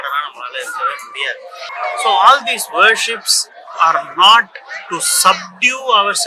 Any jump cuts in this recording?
yes; 1 cut; at 1.7 s

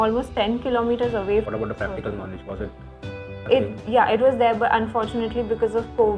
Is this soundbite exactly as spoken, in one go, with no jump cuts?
no; 1 cut; at 1.5 s

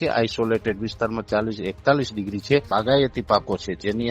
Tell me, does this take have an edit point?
yes; 1 cut; at 2.7 s

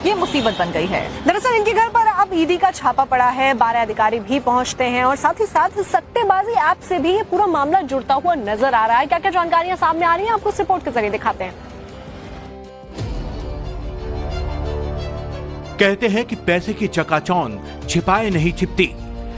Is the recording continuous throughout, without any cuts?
no; 1 cut; at 12.8 s

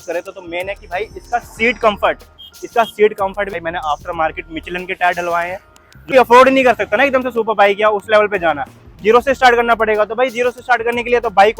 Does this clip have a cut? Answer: yes; 2 cuts; at 3.5 s, 6.1 s

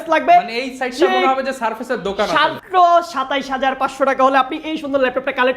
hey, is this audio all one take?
no; 1 cut; at 2.6 s

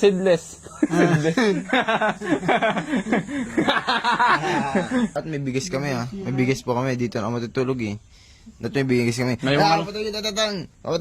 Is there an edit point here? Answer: yes; 1 cut; at 5.2 s

